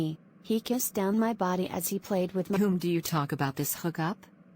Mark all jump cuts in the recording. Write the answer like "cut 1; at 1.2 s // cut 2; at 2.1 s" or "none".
cut 1; at 2.6 s